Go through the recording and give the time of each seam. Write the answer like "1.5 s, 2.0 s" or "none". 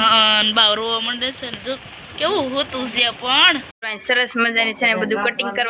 3.9 s